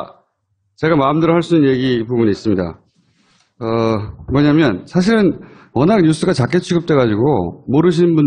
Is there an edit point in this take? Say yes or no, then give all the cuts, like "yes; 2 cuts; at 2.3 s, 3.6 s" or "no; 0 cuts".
no; 0 cuts